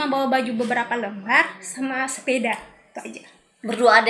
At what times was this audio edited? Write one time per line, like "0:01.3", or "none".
none